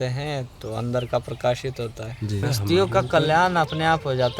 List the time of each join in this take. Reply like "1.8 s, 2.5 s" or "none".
2.4 s